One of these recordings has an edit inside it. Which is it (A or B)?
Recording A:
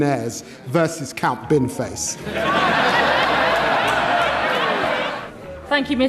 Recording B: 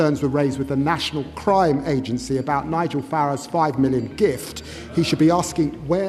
A